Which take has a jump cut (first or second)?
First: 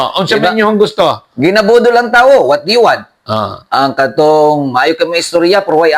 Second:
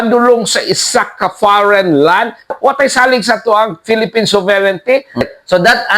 second